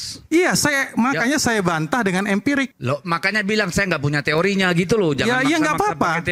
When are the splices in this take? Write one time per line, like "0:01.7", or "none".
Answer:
none